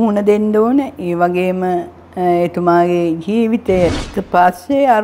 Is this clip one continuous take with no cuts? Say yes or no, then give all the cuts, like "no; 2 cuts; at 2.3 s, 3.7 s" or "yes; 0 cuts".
no; 1 cut; at 4.0 s